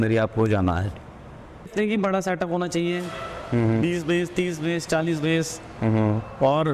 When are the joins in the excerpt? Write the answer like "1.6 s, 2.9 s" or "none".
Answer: 1.7 s